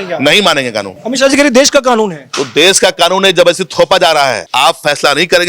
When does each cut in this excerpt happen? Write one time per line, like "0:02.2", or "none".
0:01.0
0:04.5